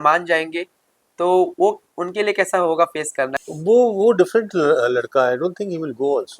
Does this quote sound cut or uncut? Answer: cut